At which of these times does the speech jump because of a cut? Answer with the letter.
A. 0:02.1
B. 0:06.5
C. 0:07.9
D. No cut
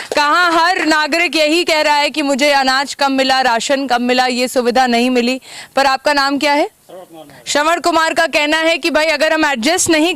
D